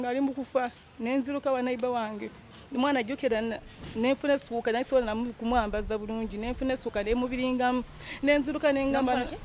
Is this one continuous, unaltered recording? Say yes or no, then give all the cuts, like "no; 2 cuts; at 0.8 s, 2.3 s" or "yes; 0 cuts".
yes; 0 cuts